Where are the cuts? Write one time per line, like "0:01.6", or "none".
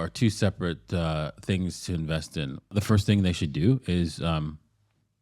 0:02.7